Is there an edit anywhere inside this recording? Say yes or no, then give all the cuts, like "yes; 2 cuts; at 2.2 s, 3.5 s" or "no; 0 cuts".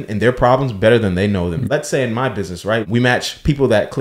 yes; 2 cuts; at 1.6 s, 2.9 s